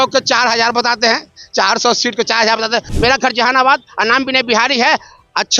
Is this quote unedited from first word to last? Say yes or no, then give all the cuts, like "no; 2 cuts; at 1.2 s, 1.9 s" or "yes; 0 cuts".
no; 1 cut; at 2.9 s